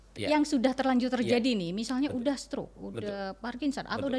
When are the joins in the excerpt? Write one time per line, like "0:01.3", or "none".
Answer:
none